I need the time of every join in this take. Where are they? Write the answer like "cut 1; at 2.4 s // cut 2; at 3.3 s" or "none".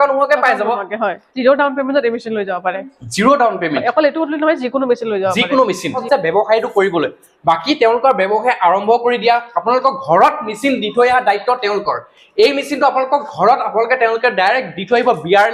cut 1; at 1.3 s // cut 2; at 6.0 s